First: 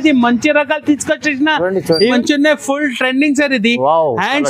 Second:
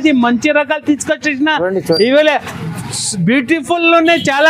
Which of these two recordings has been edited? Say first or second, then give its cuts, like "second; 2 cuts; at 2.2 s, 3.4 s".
first; 1 cut; at 2.0 s